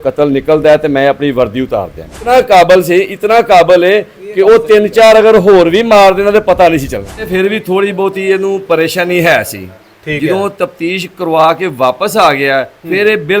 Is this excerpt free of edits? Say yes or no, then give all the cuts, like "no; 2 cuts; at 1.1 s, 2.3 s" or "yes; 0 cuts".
no; 2 cuts; at 2.3 s, 7.3 s